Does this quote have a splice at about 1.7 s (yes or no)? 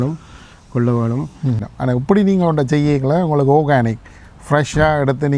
yes